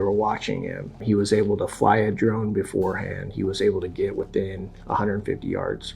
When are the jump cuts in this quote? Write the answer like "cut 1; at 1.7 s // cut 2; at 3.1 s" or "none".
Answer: cut 1; at 1.0 s